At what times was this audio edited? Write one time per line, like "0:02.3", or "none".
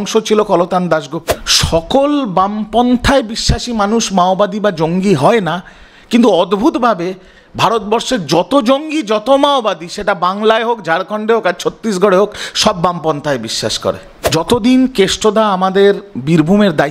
0:01.2
0:14.1